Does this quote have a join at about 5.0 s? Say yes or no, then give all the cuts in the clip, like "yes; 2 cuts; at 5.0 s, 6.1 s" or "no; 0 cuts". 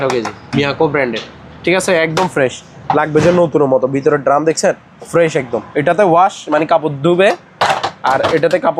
no; 0 cuts